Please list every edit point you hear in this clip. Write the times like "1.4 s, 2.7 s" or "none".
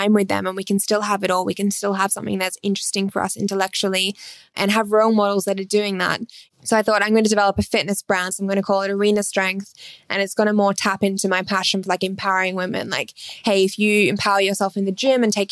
6.5 s, 8.3 s